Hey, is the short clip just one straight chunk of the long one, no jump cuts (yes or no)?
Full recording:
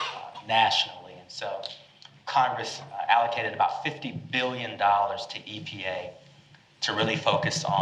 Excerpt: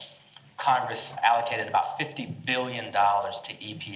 no